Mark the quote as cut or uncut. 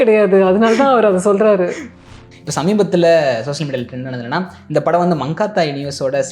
cut